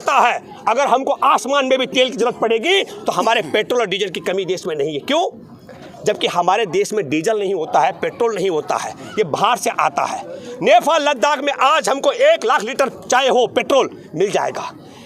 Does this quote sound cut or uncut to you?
uncut